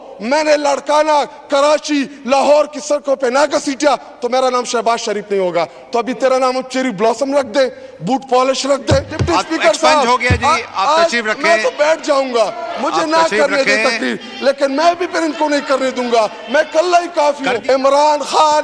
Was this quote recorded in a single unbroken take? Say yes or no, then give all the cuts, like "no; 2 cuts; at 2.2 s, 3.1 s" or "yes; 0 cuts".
no; 2 cuts; at 9.1 s, 17.5 s